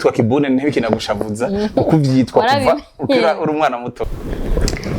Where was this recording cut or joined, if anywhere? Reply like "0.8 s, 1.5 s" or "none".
3.9 s